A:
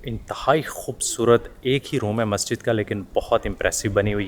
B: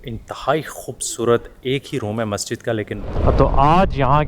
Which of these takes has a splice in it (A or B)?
B